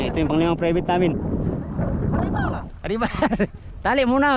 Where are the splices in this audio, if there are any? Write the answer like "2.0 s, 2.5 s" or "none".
1.6 s